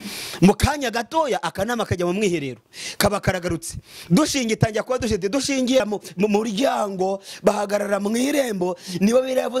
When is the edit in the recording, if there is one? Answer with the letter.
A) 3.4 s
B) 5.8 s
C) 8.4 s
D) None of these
B